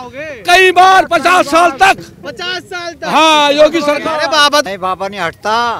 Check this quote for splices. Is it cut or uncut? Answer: cut